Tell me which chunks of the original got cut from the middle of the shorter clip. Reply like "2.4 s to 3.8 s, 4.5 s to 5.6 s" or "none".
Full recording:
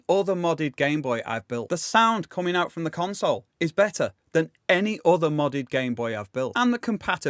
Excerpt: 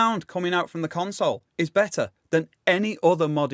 none